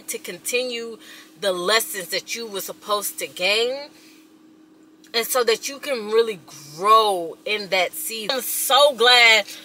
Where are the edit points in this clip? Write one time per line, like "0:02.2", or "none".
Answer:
0:08.4